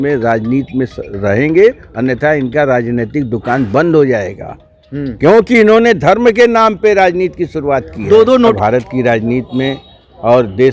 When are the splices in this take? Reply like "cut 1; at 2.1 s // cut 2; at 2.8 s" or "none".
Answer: cut 1; at 8.5 s